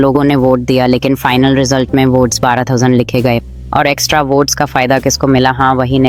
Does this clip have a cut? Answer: no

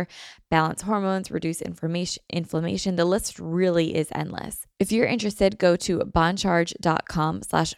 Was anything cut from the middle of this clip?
yes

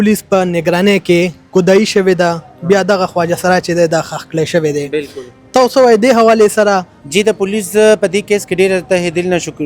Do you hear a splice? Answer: no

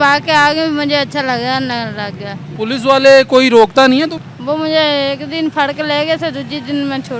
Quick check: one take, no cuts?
no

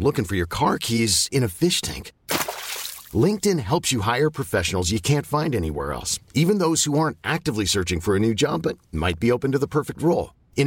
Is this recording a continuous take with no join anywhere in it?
yes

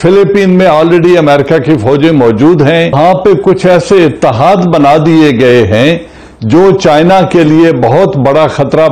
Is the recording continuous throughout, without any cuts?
no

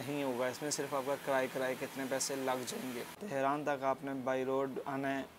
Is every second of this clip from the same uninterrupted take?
no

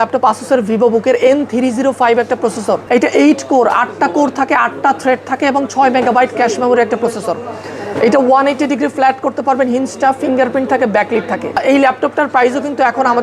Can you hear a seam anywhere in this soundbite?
yes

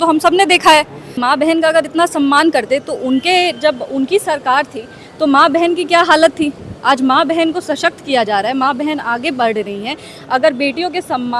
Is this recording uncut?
no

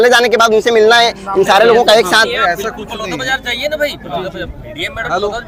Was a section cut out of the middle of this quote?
no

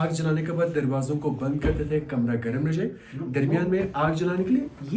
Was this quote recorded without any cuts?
yes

